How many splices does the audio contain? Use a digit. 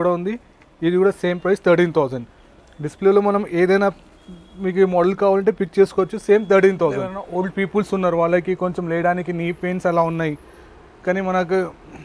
1